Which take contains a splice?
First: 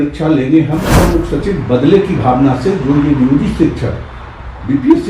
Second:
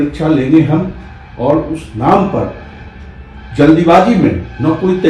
first; 1 cut; at 0.9 s

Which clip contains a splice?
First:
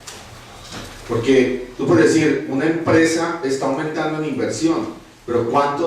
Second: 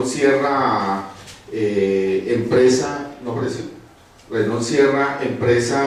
first; 1 cut; at 2.7 s

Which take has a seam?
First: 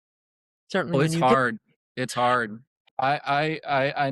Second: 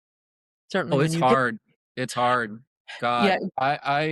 first; 1 cut; at 2.9 s

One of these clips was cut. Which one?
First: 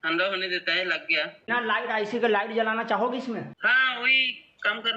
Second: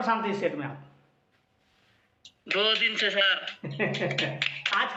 first; 1 cut; at 1.5 s

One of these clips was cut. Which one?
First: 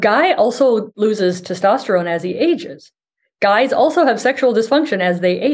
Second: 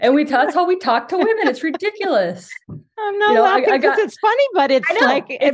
first; 1 cut; at 0.9 s

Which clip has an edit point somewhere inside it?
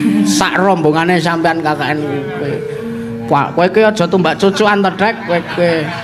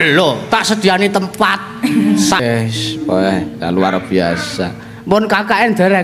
second; 1 cut; at 2.4 s

